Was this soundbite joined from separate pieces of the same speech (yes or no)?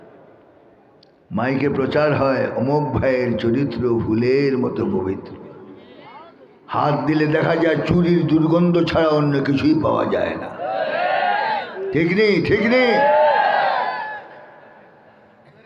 no